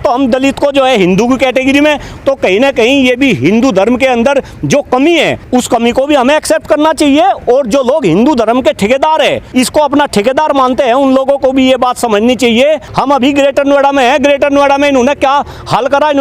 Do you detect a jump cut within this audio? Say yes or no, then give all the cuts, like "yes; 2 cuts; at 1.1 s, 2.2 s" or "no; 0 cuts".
yes; 4 cuts; at 2.1 s, 5.4 s, 9.4 s, 12.9 s